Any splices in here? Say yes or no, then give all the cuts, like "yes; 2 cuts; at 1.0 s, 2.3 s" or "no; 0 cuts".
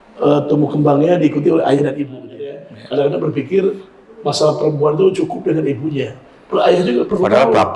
yes; 1 cut; at 2.6 s